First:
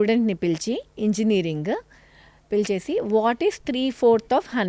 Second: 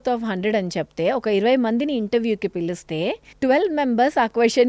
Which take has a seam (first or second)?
second